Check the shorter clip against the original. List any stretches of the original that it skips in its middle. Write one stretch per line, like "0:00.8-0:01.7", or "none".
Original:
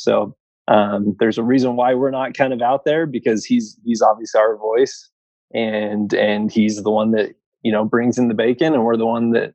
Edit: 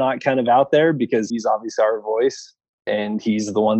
0:03.4-0:03.8
0:05.4-0:06.2

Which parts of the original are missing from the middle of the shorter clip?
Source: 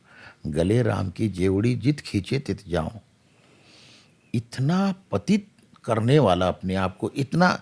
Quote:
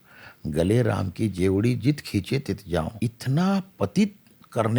0:02.9-0:04.2

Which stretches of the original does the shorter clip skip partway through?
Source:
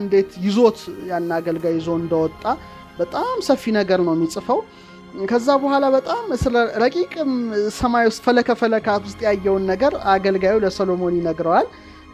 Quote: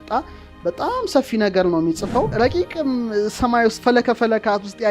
0:04.7-0:06.7

